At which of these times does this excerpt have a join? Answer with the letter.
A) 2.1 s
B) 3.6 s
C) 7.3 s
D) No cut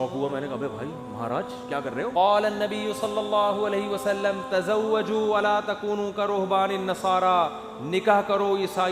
A